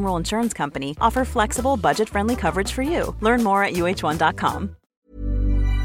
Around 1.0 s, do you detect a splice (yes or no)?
no